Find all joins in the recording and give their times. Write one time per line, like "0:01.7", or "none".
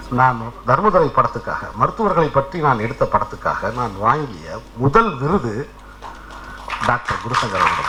none